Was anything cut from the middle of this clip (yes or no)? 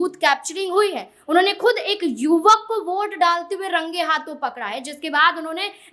no